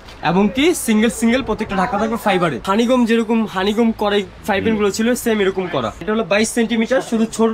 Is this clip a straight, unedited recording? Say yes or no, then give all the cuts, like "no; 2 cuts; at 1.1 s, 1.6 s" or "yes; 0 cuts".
no; 2 cuts; at 2.6 s, 6.0 s